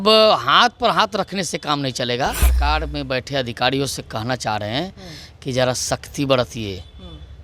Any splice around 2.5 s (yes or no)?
yes